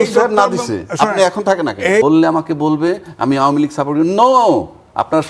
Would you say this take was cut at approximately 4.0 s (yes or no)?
no